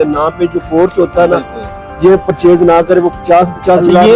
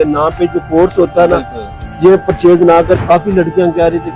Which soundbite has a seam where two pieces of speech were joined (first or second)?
second